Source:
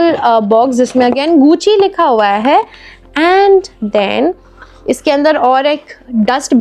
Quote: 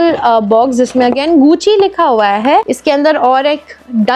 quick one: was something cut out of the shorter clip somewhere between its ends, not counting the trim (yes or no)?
yes